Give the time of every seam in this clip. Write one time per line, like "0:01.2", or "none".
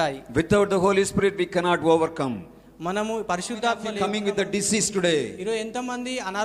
0:04.0